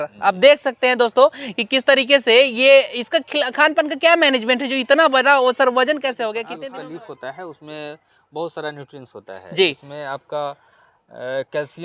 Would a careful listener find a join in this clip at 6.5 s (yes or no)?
yes